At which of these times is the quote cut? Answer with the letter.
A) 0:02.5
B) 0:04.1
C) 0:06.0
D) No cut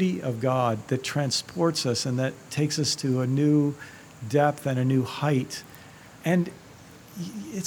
C